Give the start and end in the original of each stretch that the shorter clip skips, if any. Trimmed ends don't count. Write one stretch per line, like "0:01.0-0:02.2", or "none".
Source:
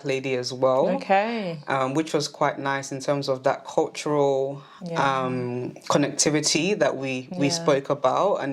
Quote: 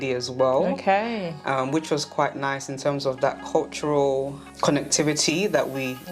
0:04.7-0:05.7